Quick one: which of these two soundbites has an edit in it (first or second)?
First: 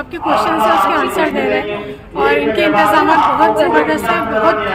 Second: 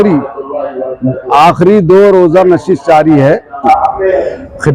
second